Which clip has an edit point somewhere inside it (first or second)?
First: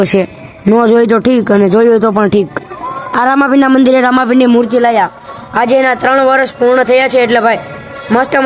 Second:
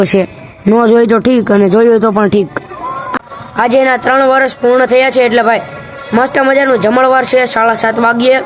second